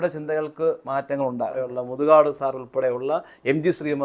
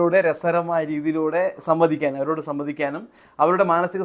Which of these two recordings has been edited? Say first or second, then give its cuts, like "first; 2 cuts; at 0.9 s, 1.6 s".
first; 1 cut; at 1.7 s